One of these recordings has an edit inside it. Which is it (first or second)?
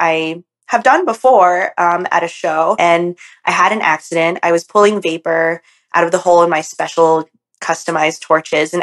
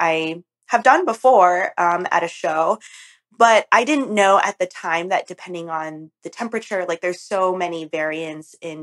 first